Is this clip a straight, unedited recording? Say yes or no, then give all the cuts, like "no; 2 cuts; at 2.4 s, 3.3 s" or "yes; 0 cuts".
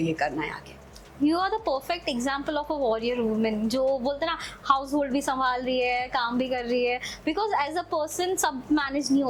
yes; 0 cuts